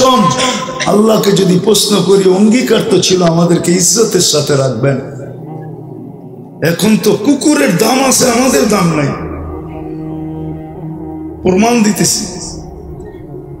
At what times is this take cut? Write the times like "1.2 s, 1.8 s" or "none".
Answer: 5.2 s, 6.6 s, 9.2 s, 11.4 s